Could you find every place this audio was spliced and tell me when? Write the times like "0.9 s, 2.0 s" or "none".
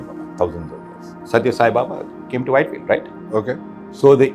1.1 s